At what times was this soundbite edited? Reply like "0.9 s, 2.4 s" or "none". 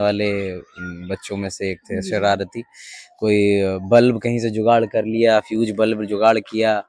none